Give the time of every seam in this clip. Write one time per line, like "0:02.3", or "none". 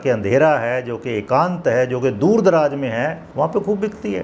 0:03.2